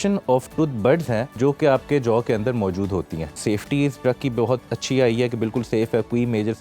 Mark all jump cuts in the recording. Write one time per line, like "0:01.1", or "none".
0:01.3
0:03.3
0:04.7